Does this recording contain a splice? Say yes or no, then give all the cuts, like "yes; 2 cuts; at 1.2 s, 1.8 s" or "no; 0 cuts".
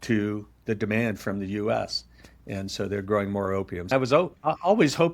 yes; 1 cut; at 3.9 s